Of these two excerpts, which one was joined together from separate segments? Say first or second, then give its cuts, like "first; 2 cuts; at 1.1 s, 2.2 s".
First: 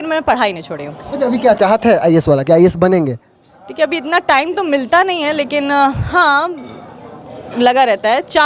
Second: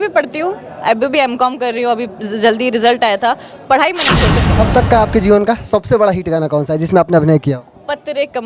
second; 1 cut; at 4.5 s